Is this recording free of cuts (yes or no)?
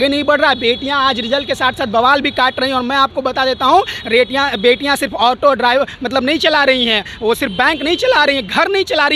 yes